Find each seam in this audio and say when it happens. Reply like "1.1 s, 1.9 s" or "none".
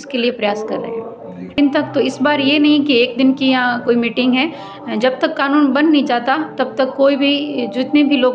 1.5 s